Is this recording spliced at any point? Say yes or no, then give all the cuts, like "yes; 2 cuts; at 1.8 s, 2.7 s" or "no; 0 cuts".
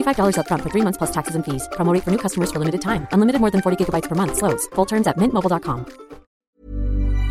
yes; 1 cut; at 6.4 s